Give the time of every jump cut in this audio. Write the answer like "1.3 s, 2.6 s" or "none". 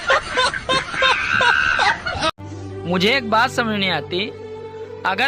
2.1 s